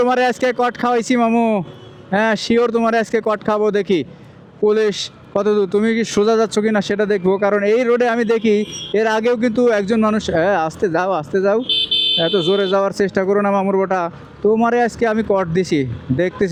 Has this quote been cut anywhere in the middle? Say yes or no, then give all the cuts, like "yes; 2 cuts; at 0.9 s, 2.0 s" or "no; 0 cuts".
no; 0 cuts